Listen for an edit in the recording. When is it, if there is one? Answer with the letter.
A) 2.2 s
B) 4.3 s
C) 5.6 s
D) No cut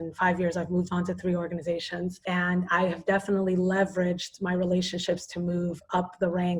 A